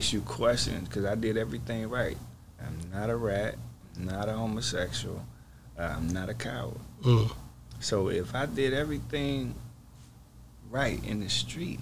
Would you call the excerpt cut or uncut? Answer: uncut